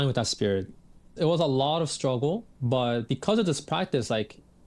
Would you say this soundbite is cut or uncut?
cut